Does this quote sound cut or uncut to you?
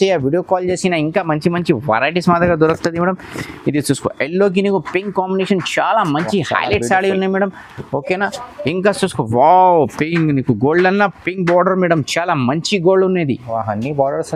uncut